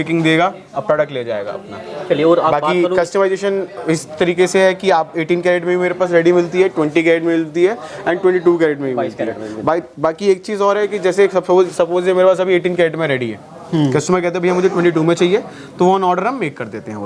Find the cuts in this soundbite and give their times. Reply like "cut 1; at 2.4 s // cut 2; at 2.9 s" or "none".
none

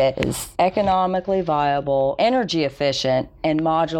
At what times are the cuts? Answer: cut 1; at 2.2 s

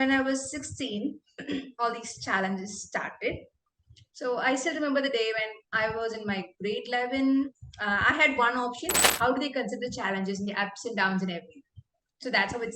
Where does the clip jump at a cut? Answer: cut 1; at 9.1 s

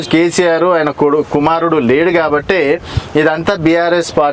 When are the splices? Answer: none

